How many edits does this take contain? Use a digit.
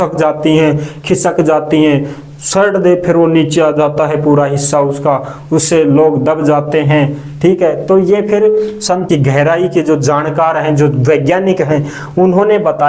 1